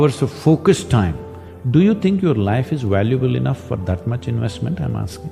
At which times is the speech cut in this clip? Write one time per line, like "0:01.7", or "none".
none